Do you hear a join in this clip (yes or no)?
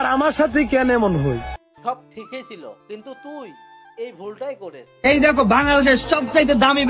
yes